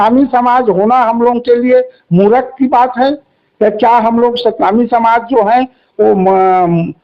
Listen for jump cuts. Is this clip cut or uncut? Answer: uncut